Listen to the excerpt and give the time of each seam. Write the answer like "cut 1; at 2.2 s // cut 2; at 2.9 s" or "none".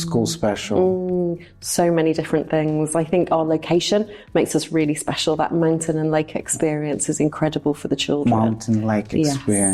none